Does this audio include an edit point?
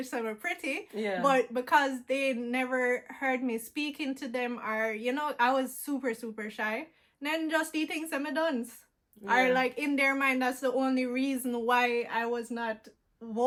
no; 0 cuts

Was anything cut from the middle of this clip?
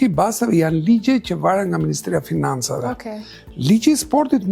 no; 0 cuts

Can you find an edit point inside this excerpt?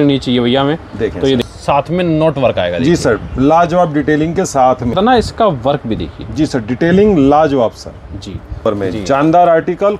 yes; 3 cuts; at 1.4 s, 4.9 s, 8.6 s

